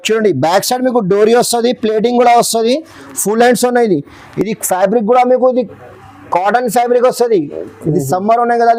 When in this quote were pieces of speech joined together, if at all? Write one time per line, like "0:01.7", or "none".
none